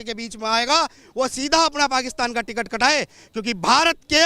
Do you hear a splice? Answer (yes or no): no